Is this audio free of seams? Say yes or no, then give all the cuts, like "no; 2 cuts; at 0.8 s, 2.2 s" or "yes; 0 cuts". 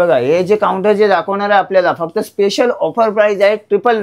yes; 0 cuts